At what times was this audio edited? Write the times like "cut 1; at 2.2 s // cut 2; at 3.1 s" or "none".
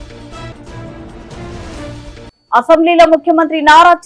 cut 1; at 2.2 s